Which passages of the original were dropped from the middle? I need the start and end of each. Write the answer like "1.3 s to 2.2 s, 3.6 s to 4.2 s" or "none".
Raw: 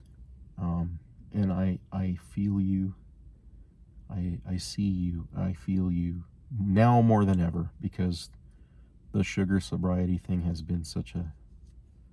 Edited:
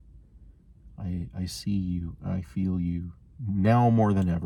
none